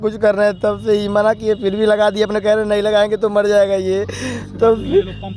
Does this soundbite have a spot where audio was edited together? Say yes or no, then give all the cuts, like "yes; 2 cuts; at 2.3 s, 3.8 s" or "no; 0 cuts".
no; 0 cuts